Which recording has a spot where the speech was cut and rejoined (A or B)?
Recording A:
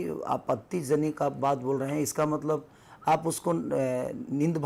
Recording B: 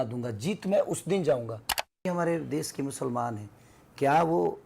B